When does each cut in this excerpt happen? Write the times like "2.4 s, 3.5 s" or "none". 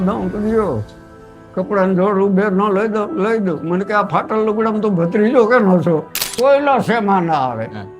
6.2 s